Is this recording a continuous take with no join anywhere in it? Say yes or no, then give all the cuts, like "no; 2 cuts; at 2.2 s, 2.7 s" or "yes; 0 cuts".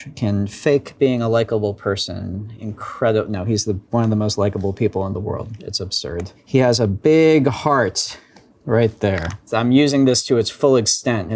yes; 0 cuts